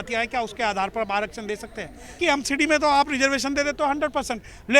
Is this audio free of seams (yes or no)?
no